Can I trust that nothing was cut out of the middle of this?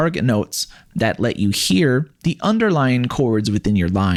yes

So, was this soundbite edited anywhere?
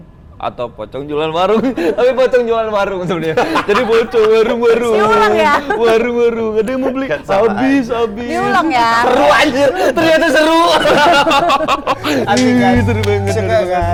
no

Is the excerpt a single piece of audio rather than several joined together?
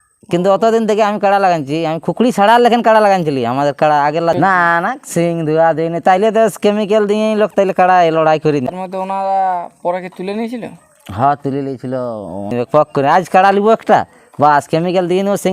no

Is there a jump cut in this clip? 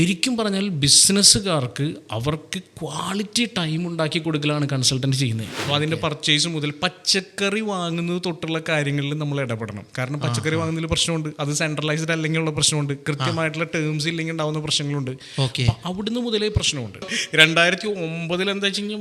yes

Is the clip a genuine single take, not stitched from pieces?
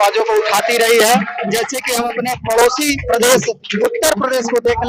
yes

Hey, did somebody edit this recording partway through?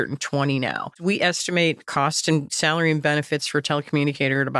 yes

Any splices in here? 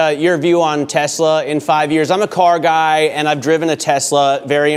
no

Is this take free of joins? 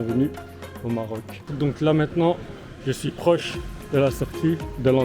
no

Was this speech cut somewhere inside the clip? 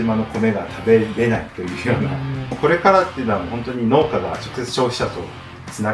yes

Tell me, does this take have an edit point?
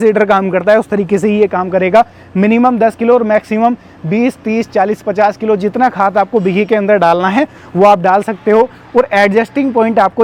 no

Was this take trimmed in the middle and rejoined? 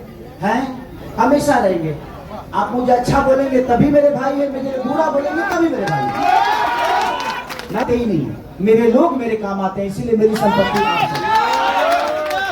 yes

